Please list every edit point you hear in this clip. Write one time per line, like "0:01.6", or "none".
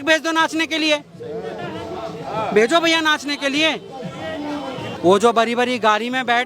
0:05.0